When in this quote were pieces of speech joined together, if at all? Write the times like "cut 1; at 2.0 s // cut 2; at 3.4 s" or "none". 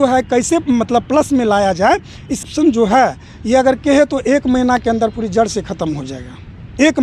cut 1; at 2.3 s